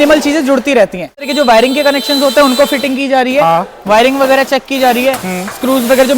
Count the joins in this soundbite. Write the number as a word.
one